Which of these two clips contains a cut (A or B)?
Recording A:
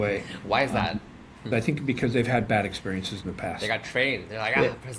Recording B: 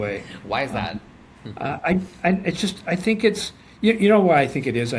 A